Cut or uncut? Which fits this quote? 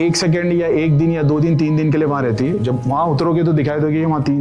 uncut